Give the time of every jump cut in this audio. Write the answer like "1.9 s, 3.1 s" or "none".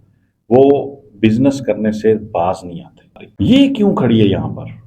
3.1 s